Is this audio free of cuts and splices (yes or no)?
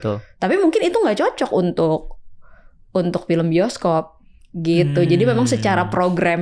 yes